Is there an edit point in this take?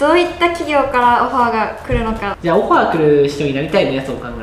yes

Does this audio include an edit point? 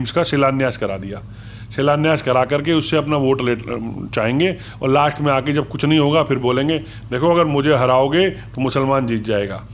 no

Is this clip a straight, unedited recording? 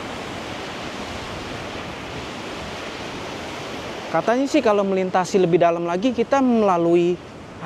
yes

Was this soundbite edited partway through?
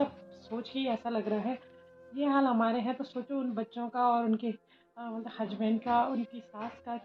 no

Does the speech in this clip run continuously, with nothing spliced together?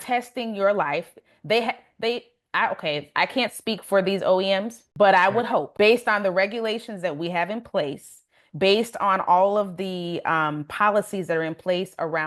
no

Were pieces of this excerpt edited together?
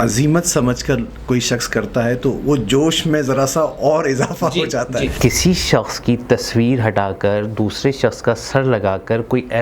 yes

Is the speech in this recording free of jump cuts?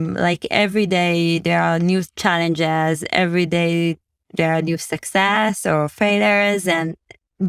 yes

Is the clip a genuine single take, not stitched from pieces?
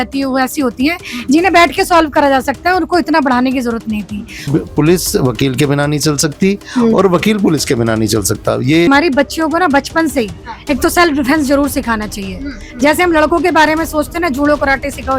no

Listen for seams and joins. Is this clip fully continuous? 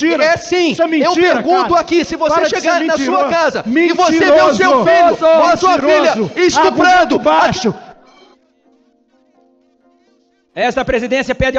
yes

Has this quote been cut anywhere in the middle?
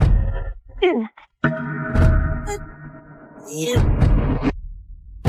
no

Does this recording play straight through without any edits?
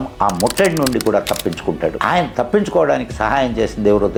yes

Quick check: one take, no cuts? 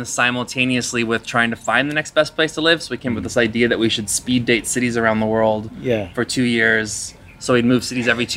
yes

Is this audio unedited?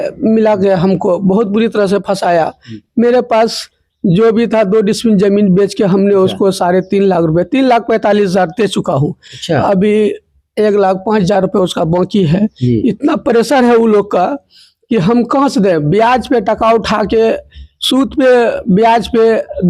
yes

